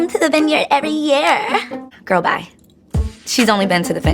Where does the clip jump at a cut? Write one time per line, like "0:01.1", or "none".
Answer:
0:01.9